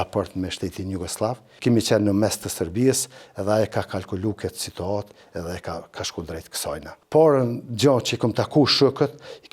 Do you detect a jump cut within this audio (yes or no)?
yes